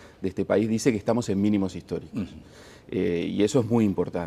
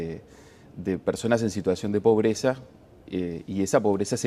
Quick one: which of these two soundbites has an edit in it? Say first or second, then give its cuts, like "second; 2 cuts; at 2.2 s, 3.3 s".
second; 1 cut; at 1.0 s